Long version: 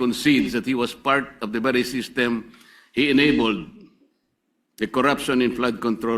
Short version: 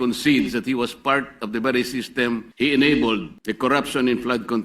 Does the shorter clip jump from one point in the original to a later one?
yes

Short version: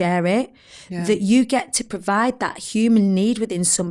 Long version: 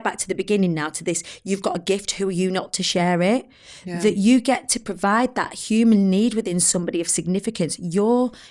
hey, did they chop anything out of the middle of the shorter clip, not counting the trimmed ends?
no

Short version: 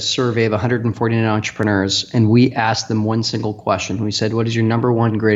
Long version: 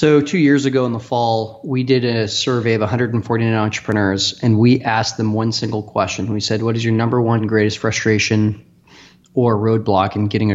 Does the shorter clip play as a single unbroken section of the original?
yes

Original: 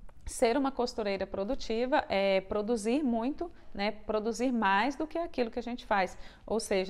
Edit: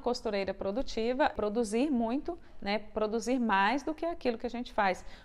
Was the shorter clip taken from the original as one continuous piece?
no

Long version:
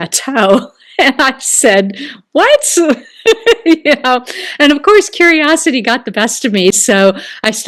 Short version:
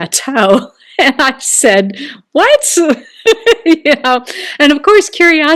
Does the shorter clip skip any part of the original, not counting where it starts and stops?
no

